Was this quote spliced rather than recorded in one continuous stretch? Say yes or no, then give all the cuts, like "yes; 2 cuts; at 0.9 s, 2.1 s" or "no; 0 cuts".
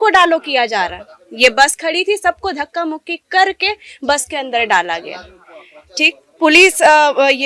no; 0 cuts